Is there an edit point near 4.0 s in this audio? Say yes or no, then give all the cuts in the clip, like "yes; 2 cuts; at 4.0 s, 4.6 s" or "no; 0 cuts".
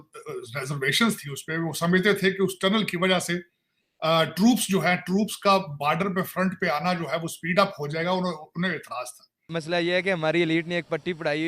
no; 1 cut; at 9.5 s